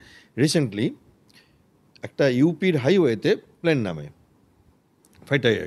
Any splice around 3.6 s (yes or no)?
no